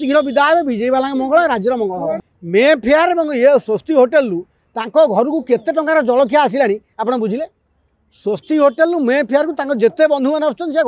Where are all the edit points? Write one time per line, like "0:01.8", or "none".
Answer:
0:02.3